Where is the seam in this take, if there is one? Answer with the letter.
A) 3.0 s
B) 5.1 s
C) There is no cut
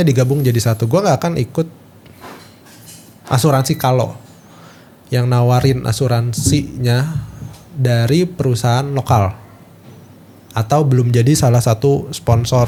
C